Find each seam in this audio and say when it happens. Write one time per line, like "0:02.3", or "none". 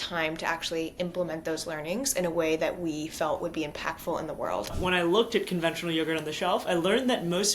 0:04.7